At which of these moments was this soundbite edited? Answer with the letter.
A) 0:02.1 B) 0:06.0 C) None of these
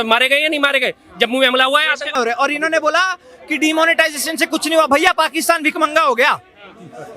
A